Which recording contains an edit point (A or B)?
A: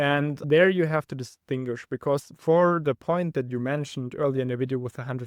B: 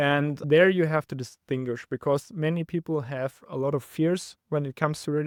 A